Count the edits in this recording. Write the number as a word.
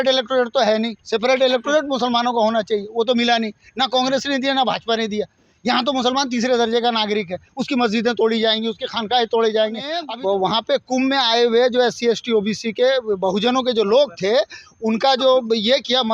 one